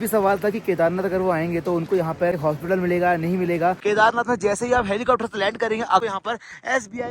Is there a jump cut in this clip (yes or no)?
yes